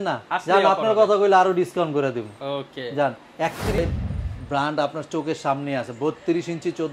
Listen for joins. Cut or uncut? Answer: cut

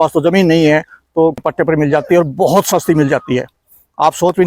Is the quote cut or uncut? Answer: cut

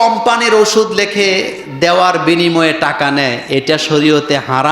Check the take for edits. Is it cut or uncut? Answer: uncut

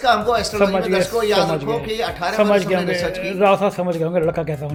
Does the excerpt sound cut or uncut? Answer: uncut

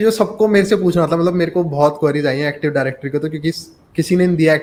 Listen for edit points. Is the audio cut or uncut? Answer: uncut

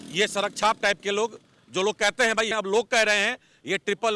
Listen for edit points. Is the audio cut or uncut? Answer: cut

